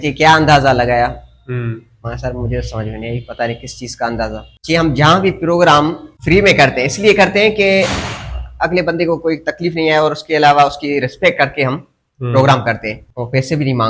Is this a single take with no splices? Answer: no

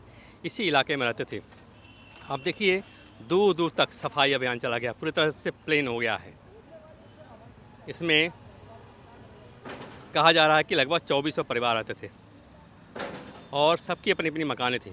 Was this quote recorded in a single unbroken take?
yes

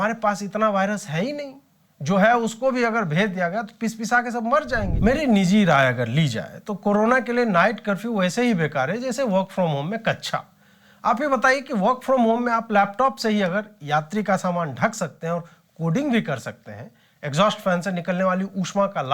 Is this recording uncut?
no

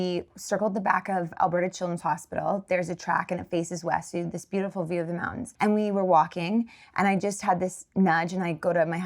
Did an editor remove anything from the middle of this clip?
yes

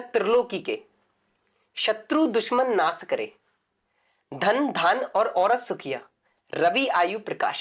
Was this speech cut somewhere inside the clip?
no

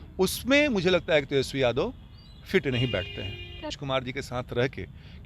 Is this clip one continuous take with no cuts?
no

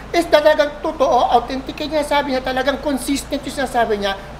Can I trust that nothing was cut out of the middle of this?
yes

